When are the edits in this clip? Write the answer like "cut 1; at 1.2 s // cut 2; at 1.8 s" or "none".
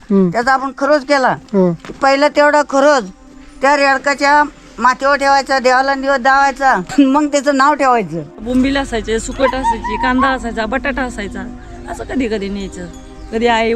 cut 1; at 6.9 s // cut 2; at 8.4 s